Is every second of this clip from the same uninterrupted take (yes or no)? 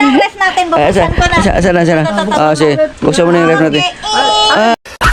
yes